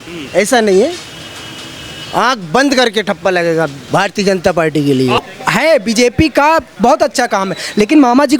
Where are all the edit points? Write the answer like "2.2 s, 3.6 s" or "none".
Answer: 5.2 s